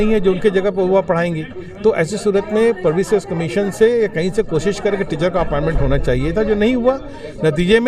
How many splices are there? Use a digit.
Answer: 0